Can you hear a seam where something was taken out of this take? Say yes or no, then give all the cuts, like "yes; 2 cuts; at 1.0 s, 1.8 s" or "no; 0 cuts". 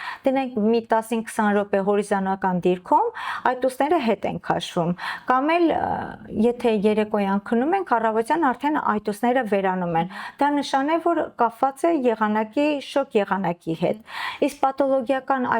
no; 0 cuts